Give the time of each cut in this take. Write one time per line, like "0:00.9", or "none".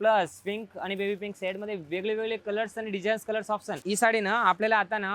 0:03.7